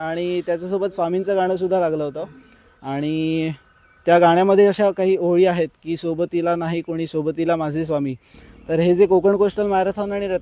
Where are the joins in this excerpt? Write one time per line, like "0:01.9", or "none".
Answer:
none